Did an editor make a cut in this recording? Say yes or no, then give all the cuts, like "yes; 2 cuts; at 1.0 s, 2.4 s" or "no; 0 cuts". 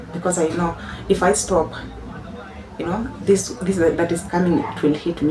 no; 0 cuts